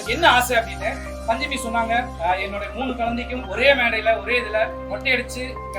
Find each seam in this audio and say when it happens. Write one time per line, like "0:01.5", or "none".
0:02.1
0:03.4
0:04.8